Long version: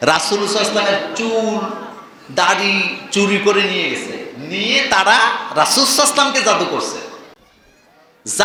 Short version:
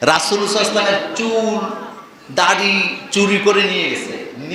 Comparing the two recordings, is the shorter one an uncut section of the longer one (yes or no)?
yes